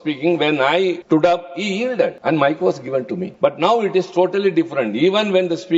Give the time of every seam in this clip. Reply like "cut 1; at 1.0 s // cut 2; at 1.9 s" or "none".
cut 1; at 1.0 s // cut 2; at 2.2 s // cut 3; at 3.2 s